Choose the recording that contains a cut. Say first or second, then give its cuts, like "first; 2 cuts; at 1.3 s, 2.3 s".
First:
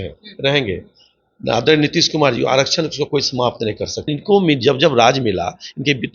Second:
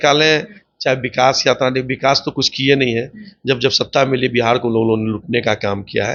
first; 1 cut; at 4.1 s